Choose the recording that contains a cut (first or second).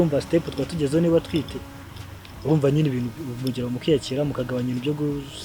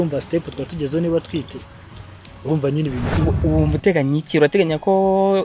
second